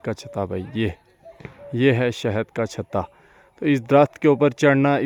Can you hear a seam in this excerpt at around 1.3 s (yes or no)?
no